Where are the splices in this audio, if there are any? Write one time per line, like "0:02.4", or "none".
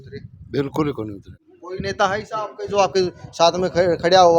0:01.3